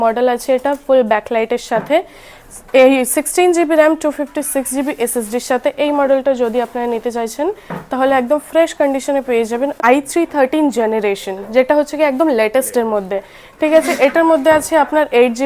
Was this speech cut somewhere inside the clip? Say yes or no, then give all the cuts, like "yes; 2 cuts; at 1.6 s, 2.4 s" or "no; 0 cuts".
yes; 1 cut; at 9.8 s